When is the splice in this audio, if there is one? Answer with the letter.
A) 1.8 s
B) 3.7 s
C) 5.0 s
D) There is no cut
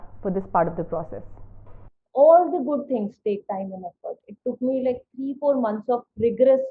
A